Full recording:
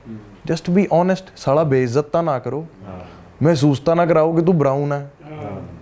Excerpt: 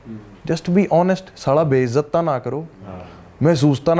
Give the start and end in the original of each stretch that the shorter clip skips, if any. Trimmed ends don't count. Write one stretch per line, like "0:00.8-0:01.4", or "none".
none